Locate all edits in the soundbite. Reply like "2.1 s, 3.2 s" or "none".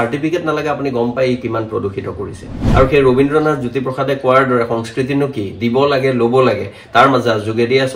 2.6 s